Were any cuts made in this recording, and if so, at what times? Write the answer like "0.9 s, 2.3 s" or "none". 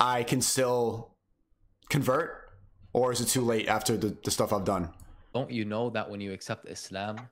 5.4 s

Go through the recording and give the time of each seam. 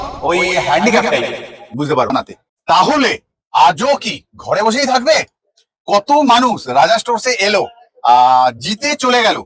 2.1 s

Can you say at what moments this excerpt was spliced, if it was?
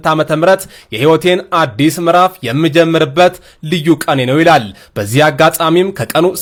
none

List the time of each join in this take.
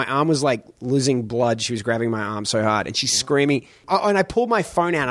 3.9 s

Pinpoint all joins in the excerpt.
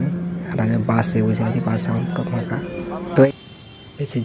3.3 s

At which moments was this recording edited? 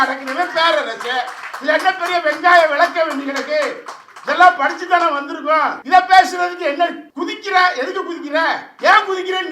5.8 s, 7.1 s, 8.7 s

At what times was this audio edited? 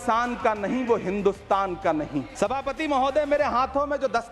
2.3 s

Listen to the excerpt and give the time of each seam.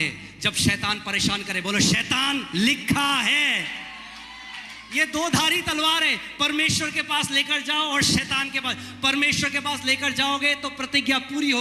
none

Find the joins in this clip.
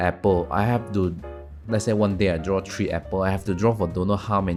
none

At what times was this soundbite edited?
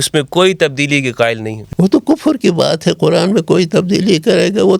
1.5 s

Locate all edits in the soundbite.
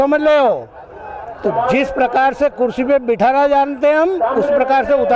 none

